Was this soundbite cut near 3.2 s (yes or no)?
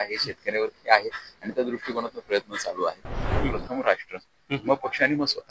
yes